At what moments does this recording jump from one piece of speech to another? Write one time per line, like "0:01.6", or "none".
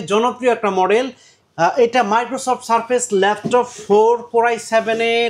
0:01.3